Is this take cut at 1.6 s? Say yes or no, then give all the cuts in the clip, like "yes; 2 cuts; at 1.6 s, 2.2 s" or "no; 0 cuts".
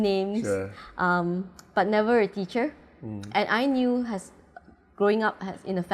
no; 0 cuts